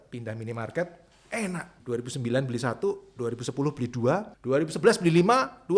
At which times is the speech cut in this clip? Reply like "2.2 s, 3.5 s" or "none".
1.7 s, 4.3 s